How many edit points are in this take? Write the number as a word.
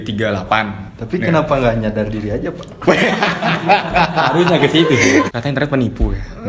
one